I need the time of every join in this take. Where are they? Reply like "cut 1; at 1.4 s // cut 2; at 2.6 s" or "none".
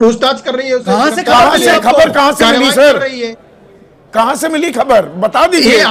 none